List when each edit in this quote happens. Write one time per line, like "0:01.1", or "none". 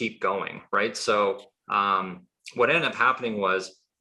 none